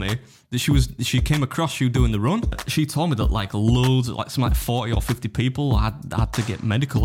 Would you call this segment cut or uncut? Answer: cut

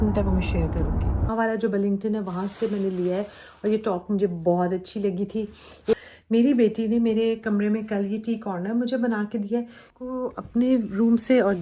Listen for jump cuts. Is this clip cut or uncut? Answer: cut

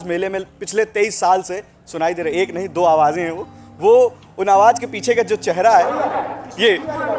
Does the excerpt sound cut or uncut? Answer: uncut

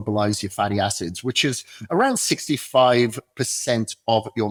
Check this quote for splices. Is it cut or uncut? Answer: uncut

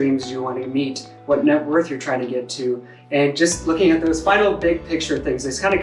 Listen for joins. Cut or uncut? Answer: cut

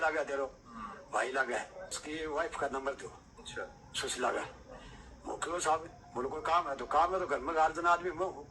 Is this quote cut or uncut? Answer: cut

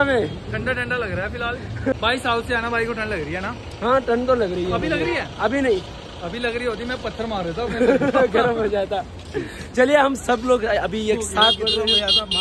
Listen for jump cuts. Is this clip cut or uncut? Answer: cut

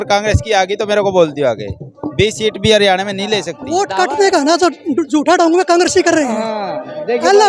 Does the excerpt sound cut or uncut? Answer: cut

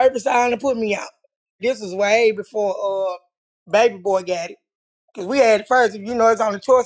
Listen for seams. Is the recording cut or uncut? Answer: cut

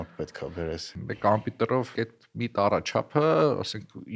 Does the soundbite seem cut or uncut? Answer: cut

